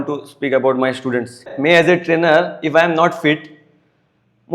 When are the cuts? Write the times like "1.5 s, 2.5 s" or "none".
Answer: 1.5 s